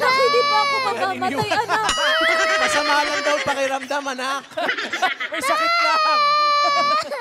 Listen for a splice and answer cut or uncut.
uncut